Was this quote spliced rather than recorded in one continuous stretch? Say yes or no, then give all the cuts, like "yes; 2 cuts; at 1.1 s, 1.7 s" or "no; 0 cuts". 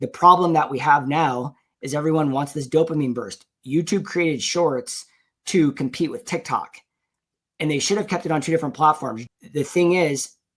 yes; 1 cut; at 9.2 s